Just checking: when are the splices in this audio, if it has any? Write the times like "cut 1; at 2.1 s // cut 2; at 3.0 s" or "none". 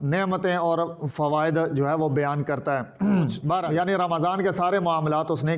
cut 1; at 3.7 s

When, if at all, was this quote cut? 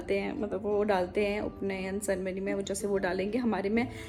none

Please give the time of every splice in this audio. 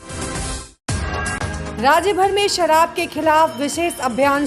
cut 1; at 1.7 s

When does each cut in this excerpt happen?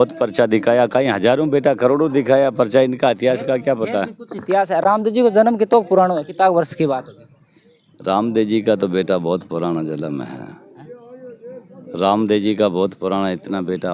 none

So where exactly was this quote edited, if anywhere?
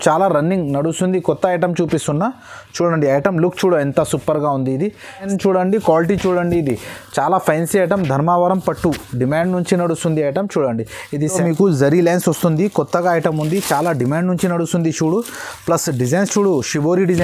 cut 1; at 5.3 s // cut 2; at 11.3 s

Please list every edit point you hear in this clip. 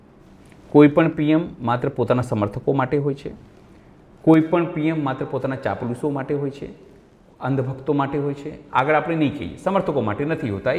none

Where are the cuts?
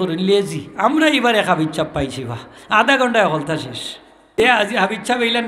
cut 1; at 4.4 s

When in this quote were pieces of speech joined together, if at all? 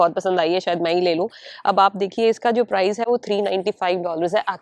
none

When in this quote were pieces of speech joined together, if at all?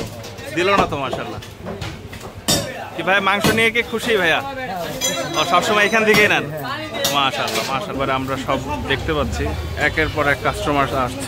cut 1; at 2.5 s // cut 2; at 7.9 s

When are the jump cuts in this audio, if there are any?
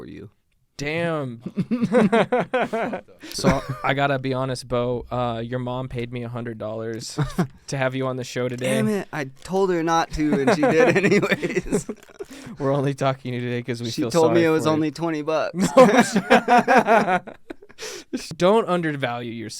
cut 1; at 3.2 s // cut 2; at 18.3 s

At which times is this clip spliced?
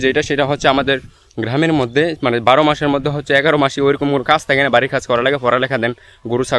none

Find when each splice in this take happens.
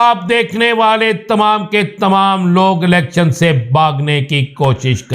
none

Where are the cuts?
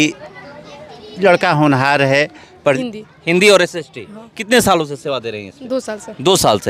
cut 1; at 2.8 s

